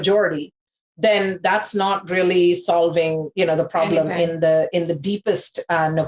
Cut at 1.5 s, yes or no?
no